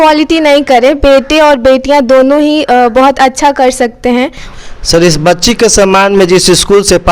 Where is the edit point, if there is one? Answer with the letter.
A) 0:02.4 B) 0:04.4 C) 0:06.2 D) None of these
B